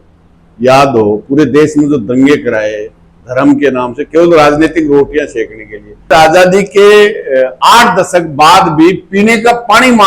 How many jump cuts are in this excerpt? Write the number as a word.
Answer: one